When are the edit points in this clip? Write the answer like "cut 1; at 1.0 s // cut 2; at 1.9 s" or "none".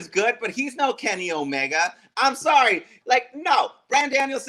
cut 1; at 2.9 s